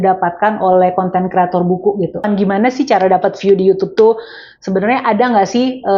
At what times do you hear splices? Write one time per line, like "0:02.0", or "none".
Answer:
0:02.2